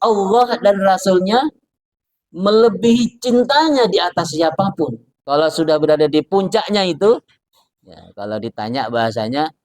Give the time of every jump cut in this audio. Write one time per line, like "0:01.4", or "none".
0:05.1